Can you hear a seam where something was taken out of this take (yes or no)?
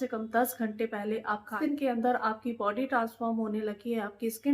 yes